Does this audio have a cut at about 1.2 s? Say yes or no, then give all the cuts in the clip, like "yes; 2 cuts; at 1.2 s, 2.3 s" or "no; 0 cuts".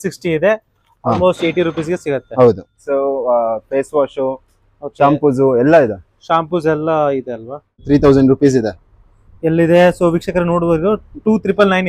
no; 2 cuts; at 2.7 s, 7.8 s